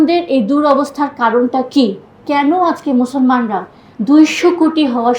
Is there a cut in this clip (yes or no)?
yes